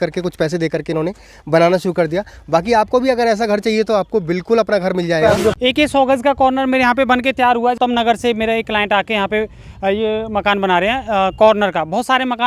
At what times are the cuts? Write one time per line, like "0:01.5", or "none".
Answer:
0:05.5
0:07.8